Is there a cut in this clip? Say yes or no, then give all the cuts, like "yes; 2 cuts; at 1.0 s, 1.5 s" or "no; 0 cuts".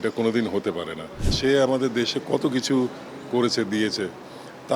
yes; 1 cut; at 1.3 s